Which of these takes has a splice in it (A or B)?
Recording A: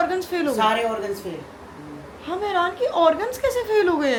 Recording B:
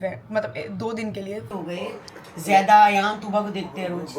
B